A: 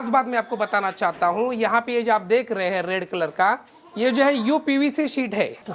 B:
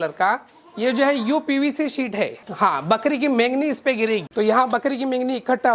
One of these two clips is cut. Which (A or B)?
B